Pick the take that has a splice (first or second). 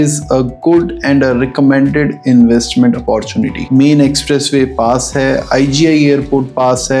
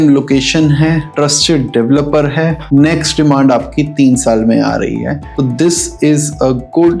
first